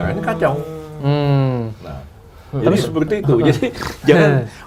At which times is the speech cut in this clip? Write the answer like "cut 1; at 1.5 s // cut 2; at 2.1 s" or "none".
none